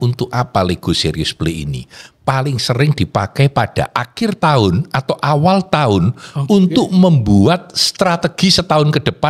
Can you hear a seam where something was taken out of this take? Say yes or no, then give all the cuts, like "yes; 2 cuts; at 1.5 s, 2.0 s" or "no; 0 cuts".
no; 0 cuts